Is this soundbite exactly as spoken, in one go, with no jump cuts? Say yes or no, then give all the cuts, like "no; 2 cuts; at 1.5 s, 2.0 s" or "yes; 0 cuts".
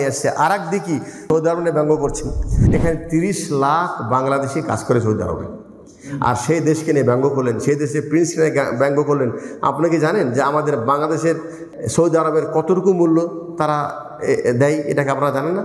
no; 3 cuts; at 1.2 s, 2.6 s, 11.6 s